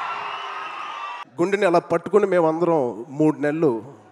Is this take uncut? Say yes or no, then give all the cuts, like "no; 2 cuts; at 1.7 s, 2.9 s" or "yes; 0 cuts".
no; 1 cut; at 1.2 s